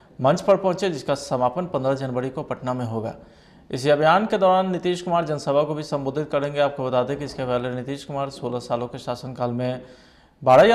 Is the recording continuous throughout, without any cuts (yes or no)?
yes